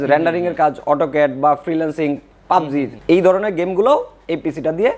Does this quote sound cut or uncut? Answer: uncut